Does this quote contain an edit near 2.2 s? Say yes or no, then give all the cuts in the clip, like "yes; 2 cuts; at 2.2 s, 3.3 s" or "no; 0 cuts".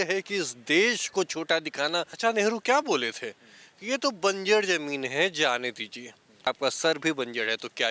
yes; 2 cuts; at 2.2 s, 6.5 s